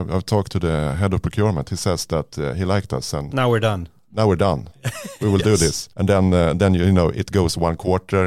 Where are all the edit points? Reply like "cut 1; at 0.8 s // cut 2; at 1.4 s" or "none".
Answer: cut 1; at 5.9 s